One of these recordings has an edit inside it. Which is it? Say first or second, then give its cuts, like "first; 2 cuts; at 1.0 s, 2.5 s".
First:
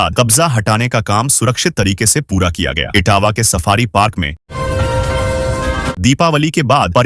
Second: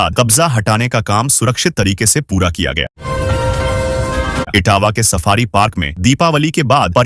second; 3 cuts; at 2.8 s, 4.5 s, 5.9 s